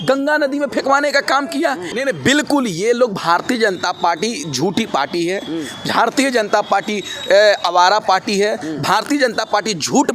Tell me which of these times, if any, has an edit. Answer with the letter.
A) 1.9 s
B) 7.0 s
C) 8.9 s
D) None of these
A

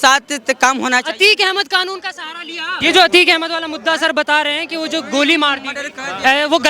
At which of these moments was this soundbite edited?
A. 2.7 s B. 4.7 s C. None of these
A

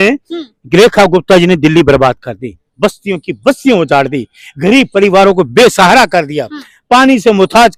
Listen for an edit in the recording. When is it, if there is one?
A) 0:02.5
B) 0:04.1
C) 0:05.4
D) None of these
D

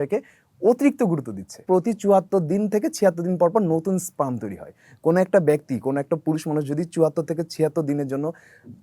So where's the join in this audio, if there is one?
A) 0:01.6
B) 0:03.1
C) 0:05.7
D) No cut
A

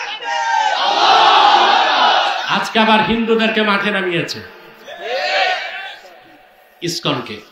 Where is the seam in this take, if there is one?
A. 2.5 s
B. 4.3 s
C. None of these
A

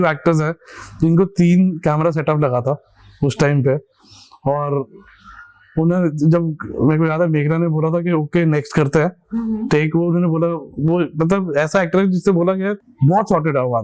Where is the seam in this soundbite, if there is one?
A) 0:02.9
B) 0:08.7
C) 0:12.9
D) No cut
C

